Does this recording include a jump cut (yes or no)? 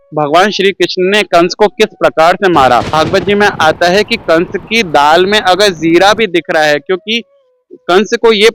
yes